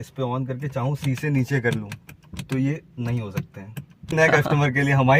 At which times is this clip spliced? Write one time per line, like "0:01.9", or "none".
0:04.2